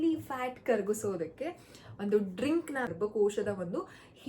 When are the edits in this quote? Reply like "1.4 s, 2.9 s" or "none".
2.9 s